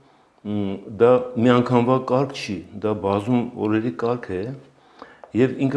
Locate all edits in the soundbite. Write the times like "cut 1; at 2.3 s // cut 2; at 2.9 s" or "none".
none